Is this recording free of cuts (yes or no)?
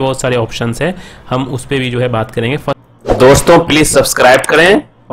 no